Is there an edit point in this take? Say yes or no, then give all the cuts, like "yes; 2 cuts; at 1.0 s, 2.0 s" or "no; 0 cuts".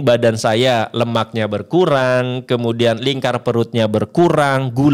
no; 0 cuts